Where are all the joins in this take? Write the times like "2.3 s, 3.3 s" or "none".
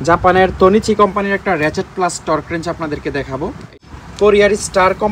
3.7 s